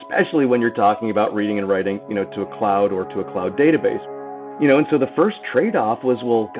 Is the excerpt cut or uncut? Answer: cut